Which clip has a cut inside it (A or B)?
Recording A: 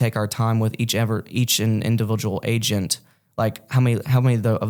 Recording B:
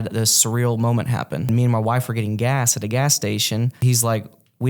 B